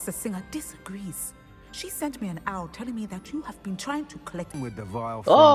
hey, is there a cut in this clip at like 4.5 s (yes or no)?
yes